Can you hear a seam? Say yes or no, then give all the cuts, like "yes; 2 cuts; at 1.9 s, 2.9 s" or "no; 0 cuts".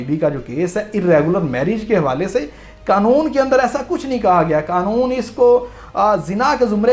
no; 0 cuts